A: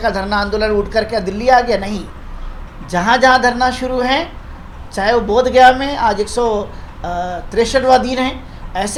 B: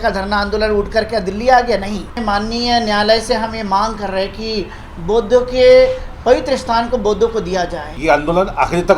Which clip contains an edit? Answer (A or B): B